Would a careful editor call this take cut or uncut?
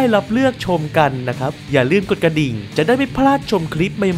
cut